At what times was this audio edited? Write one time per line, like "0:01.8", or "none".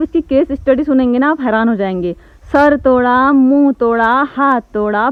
none